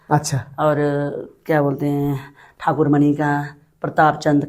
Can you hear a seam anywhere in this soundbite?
no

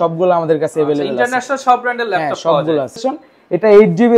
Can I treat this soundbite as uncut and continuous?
no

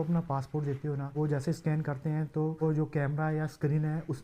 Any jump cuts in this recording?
yes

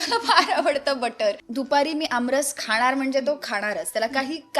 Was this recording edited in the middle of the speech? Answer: yes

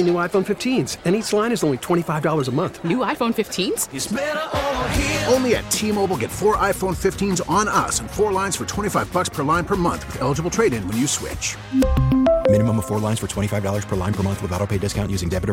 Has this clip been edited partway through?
no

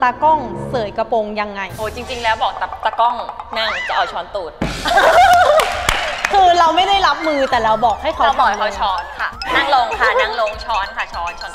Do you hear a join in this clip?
yes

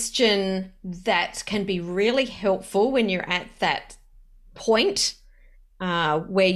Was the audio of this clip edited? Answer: no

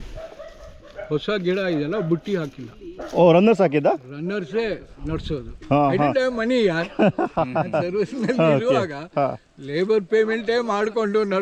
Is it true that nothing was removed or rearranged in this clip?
yes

